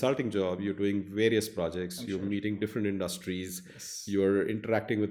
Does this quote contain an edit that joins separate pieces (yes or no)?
no